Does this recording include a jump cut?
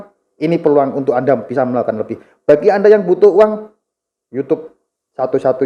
no; 0 cuts

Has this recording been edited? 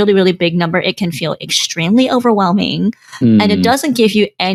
no; 0 cuts

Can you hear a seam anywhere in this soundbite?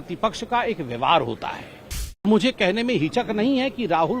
yes; 1 cut; at 2.2 s

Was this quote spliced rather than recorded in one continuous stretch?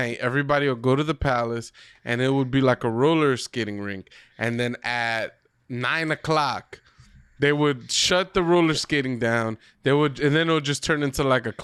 no; 0 cuts

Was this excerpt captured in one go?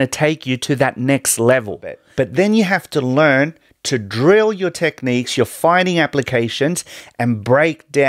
no; 1 cut; at 2.0 s

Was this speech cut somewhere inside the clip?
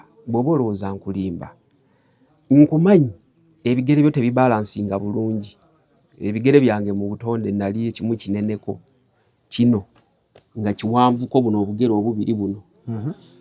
no; 0 cuts

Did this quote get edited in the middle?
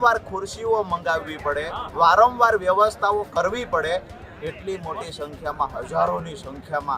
no; 0 cuts

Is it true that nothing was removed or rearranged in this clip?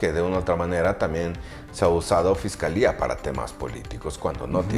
yes; 0 cuts

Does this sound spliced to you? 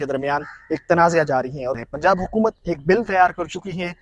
yes; 1 cut; at 1.7 s

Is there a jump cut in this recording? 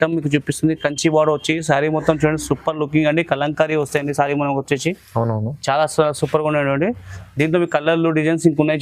no; 0 cuts

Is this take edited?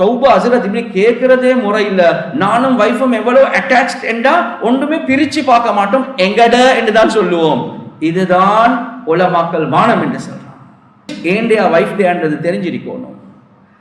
yes; 1 cut; at 11.1 s

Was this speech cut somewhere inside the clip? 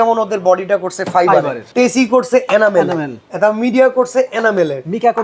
yes; 1 cut; at 1.6 s

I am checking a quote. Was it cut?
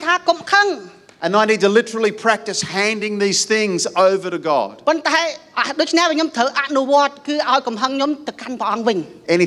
no; 0 cuts

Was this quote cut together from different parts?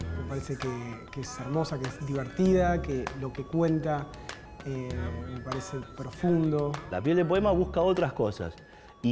yes; 1 cut; at 6.8 s

